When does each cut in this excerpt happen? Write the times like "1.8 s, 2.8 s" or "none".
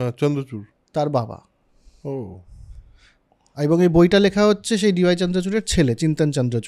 none